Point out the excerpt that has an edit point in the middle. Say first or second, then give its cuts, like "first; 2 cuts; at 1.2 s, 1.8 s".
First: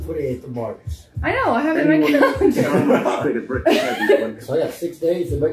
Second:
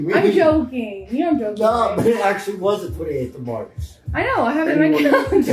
first; 1 cut; at 4.4 s